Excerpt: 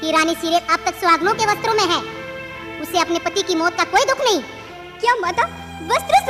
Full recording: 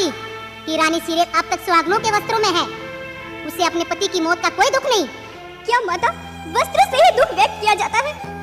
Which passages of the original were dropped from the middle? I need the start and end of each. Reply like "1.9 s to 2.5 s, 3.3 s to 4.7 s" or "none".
none